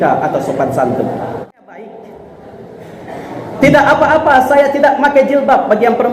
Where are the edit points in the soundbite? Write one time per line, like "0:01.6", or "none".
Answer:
0:01.8